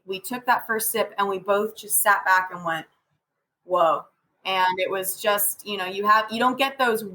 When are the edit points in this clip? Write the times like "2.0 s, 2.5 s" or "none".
4.2 s